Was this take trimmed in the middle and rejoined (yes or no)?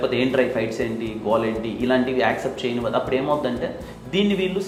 no